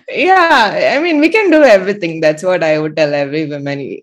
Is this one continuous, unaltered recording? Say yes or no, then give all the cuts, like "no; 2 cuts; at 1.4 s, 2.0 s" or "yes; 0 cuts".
yes; 0 cuts